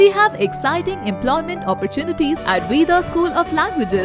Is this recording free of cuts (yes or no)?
no